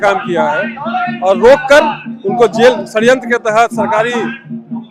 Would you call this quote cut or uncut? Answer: uncut